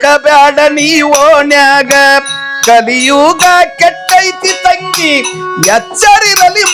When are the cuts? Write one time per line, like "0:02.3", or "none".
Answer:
none